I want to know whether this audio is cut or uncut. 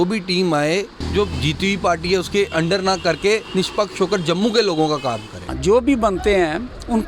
cut